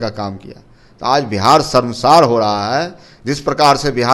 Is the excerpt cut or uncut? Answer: uncut